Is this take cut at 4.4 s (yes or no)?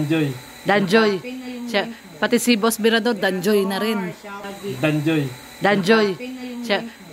yes